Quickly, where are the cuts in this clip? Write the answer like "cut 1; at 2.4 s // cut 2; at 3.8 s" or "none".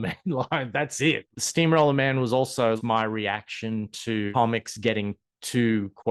cut 1; at 1.3 s // cut 2; at 2.8 s // cut 3; at 4.3 s